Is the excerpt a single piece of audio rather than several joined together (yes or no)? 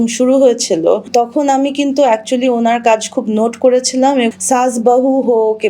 no